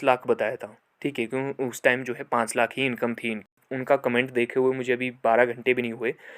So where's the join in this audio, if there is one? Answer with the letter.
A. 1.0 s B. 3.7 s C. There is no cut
B